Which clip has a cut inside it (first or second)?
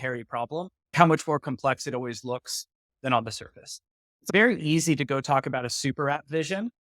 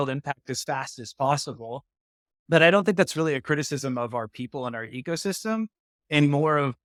first